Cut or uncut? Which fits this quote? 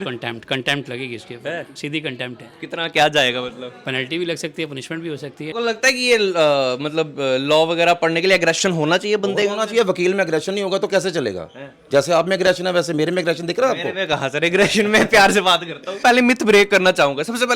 cut